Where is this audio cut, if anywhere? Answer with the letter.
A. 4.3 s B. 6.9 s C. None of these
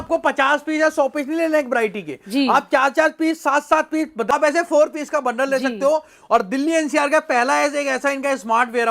A